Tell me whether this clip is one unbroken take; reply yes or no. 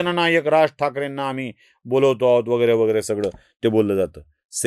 yes